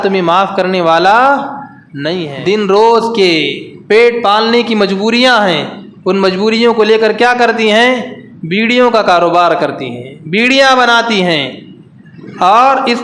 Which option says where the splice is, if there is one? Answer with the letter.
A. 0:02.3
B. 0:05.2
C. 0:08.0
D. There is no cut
A